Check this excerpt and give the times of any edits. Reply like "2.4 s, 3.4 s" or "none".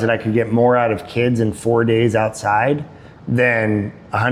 none